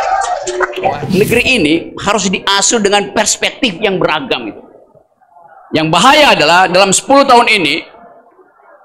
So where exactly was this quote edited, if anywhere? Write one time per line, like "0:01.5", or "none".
0:01.1